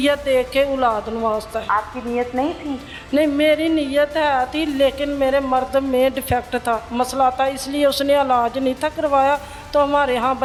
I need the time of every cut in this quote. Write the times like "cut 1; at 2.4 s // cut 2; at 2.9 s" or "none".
none